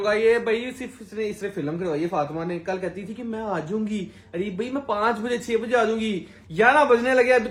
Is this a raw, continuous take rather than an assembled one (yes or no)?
yes